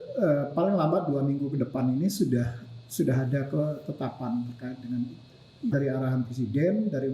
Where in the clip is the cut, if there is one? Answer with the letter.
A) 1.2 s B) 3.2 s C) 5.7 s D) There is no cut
C